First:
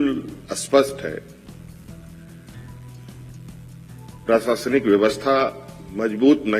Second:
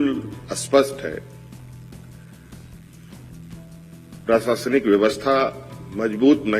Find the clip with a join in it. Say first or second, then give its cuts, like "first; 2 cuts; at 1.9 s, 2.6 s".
second; 2 cuts; at 1.3 s, 3.8 s